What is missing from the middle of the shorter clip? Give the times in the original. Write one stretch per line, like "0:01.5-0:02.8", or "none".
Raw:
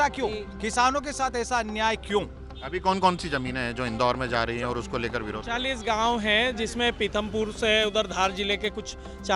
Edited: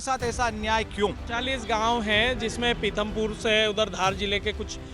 0:02.4-0:05.4